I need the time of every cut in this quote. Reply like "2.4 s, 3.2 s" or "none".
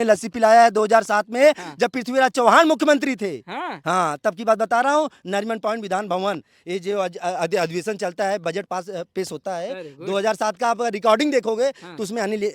none